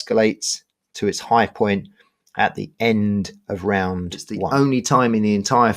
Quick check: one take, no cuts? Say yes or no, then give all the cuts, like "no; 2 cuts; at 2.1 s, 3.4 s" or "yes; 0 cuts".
no; 1 cut; at 4.5 s